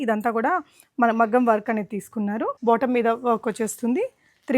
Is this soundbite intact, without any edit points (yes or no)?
no